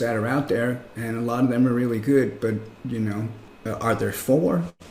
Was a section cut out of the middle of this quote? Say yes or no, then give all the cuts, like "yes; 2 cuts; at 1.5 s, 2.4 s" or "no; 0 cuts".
yes; 1 cut; at 3.4 s